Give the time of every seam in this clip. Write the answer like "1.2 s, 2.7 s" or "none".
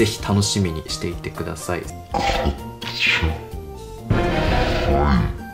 1.9 s